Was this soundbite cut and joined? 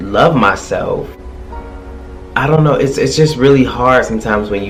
no; 0 cuts

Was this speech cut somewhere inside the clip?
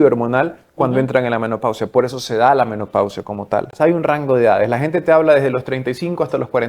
yes; 1 cut; at 3.7 s

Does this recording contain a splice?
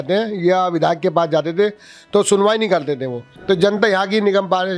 yes; 1 cut; at 3.3 s

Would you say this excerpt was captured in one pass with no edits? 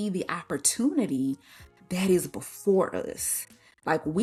yes; 0 cuts

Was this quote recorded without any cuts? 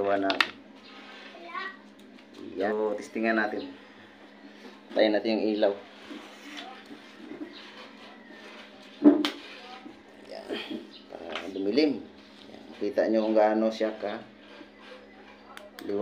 no; 1 cut; at 2.7 s

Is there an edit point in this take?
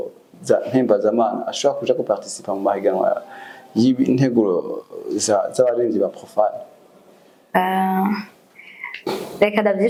no; 0 cuts

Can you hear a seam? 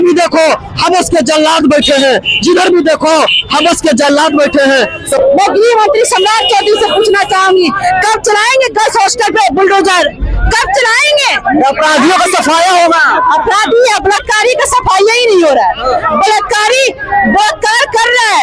yes; 1 cut; at 5.2 s

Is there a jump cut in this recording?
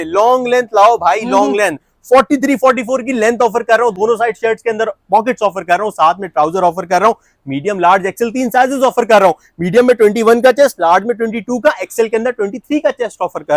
no; 0 cuts

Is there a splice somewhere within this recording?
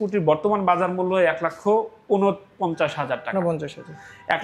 no; 0 cuts

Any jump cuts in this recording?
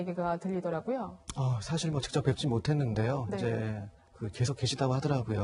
no; 0 cuts

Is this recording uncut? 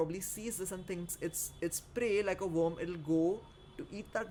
yes; 0 cuts

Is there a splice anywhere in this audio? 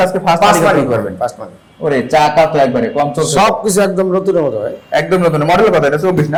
no; 0 cuts

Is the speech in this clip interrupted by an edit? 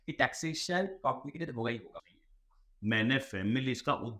yes; 1 cut; at 1.9 s

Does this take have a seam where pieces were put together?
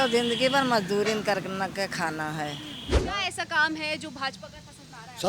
yes; 1 cut; at 3.0 s

